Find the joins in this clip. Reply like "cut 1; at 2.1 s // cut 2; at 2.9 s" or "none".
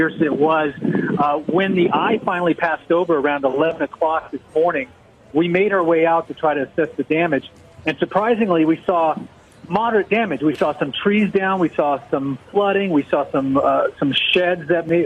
cut 1; at 6.7 s